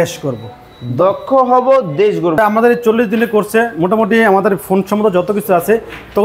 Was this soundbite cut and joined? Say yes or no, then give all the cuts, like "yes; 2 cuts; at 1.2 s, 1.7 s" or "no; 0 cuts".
yes; 1 cut; at 2.4 s